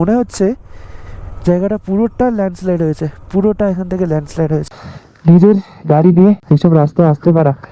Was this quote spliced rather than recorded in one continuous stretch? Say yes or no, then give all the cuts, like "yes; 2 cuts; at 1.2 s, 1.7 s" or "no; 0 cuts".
yes; 2 cuts; at 4.7 s, 6.4 s